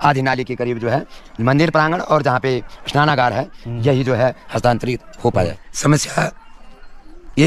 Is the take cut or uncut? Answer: cut